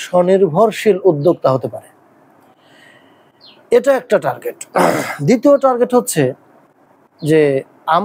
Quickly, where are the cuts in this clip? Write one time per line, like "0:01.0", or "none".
none